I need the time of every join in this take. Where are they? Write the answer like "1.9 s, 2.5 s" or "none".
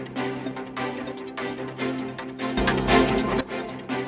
none